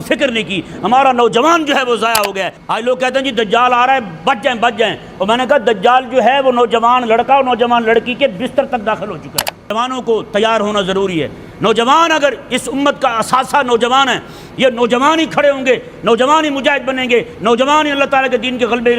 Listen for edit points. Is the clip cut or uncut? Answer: cut